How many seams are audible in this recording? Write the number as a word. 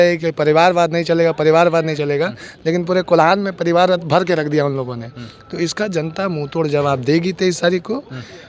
zero